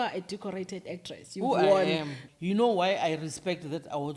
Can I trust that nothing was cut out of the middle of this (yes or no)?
no